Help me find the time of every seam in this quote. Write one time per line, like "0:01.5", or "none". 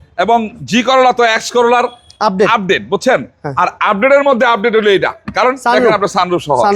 none